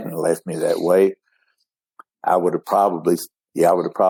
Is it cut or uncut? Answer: uncut